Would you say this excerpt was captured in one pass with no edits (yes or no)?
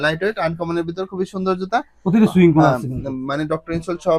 yes